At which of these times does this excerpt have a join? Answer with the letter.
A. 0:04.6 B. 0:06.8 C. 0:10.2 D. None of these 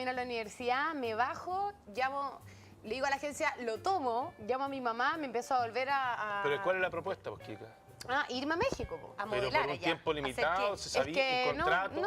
B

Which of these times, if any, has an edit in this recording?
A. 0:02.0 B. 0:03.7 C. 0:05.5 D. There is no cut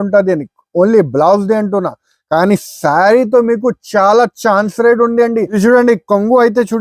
C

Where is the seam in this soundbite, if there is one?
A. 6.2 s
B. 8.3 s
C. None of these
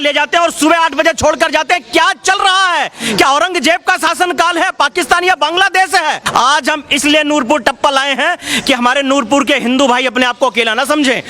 A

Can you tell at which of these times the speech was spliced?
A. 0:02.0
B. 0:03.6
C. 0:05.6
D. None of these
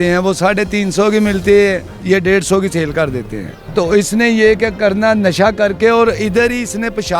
B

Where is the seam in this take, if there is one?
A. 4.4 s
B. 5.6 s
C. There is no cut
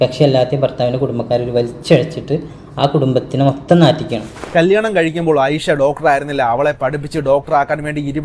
A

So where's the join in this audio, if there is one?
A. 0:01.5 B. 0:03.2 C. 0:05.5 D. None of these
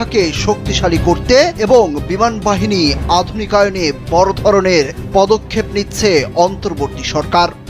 A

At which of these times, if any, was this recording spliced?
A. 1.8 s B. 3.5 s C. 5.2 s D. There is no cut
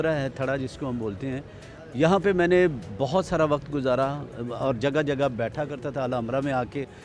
D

